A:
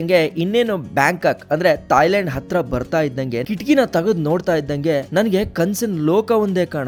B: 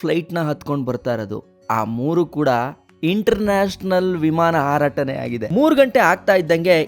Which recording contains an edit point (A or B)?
B